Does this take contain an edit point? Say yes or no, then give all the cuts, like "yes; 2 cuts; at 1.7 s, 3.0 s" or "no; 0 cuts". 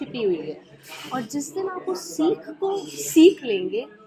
no; 0 cuts